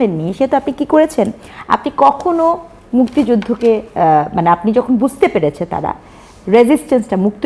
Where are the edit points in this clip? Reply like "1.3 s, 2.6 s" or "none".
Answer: none